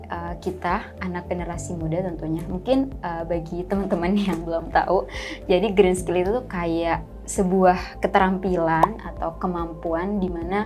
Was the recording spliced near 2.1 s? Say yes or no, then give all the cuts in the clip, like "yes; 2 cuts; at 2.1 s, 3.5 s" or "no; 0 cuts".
no; 0 cuts